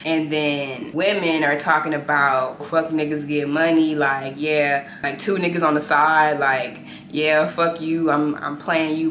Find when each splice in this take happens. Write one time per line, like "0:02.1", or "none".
0:02.7
0:05.1